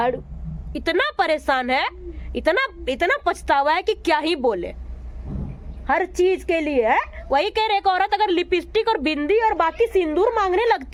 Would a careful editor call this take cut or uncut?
uncut